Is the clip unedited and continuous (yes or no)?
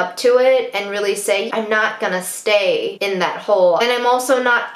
no